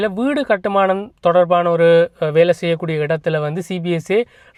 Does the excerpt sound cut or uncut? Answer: uncut